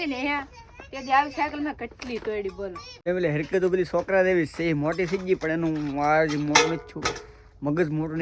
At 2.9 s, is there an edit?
yes; 1 cut; at 2.9 s

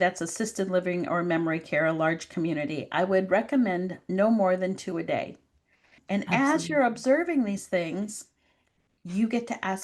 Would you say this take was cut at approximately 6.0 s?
yes; 1 cut; at 6.0 s

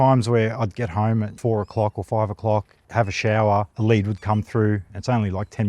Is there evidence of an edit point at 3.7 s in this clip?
yes; 1 cut; at 3.7 s

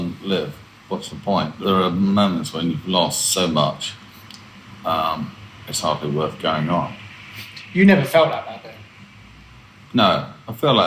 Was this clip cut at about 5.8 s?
no; 1 cut; at 1.5 s

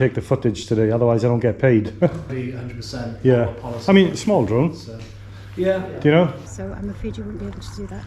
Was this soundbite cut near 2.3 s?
yes; 2 cuts; at 2.3 s, 6.4 s

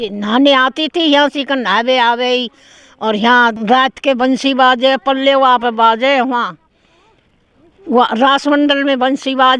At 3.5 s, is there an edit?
yes; 1 cut; at 3.5 s

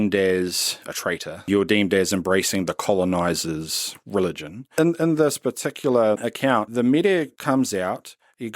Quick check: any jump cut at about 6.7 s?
yes; 3 cuts; at 1.5 s, 4.7 s, 6.7 s

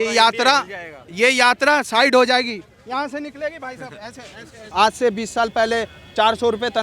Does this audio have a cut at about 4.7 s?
yes; 1 cut; at 4.7 s

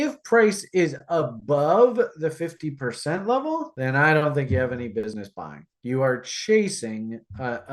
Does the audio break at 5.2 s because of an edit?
yes; 1 cut; at 5.2 s

